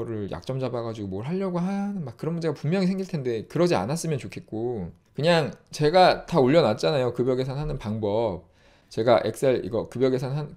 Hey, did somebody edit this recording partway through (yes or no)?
yes